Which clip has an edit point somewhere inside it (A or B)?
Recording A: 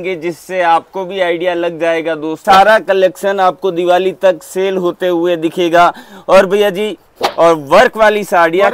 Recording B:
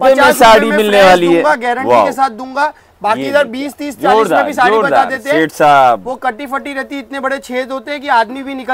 A